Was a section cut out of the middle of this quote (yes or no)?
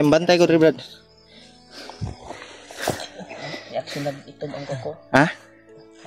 no